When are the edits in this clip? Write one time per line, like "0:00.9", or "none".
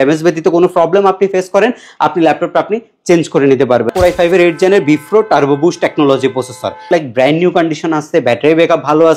0:03.9
0:06.9